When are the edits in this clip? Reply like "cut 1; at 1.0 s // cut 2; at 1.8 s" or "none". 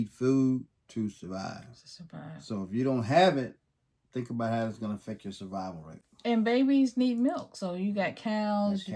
none

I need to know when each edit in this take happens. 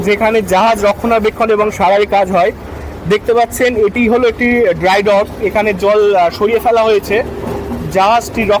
none

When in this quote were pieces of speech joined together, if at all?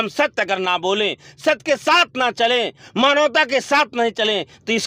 none

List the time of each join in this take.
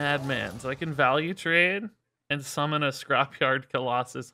none

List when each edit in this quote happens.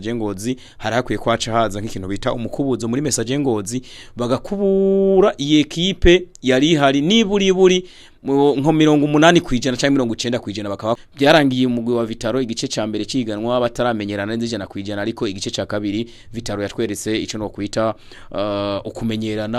cut 1; at 11.1 s

